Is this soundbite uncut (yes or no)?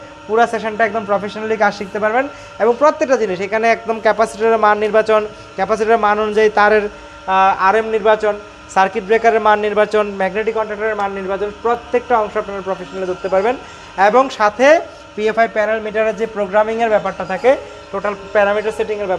yes